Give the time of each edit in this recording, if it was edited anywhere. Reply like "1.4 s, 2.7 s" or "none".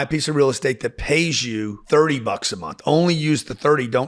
none